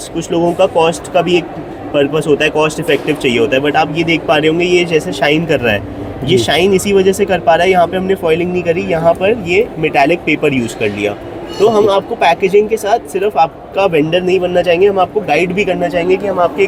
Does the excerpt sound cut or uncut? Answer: uncut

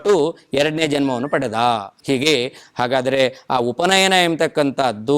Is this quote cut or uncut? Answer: cut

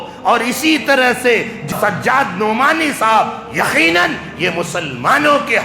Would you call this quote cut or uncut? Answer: cut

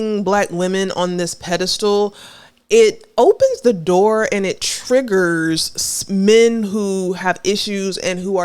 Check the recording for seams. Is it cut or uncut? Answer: uncut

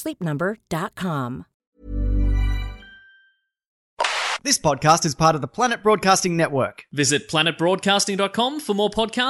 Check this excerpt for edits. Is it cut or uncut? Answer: cut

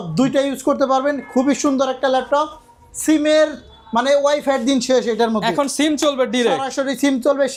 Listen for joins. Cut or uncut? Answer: uncut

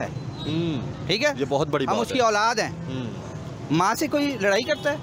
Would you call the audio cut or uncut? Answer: uncut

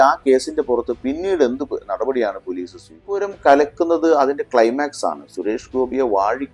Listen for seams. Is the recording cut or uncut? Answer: cut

